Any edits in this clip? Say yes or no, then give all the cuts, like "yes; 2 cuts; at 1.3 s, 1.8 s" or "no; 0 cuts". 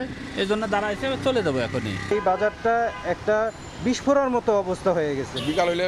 yes; 1 cut; at 1.9 s